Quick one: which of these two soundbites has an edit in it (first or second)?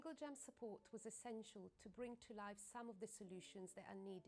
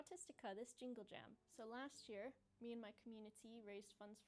first